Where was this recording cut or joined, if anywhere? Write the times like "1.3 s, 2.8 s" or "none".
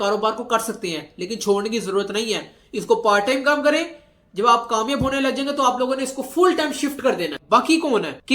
7.3 s